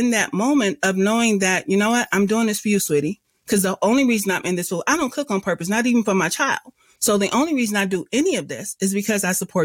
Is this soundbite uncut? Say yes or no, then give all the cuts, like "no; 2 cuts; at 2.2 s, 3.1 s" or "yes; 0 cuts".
yes; 0 cuts